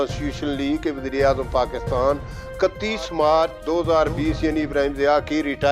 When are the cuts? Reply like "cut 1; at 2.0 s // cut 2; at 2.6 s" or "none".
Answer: cut 1; at 3.6 s